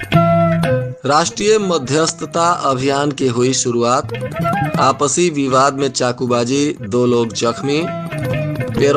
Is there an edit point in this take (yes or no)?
yes